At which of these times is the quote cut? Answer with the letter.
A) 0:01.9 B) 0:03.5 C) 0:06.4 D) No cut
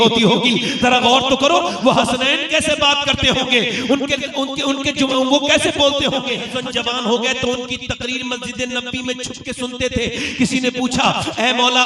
C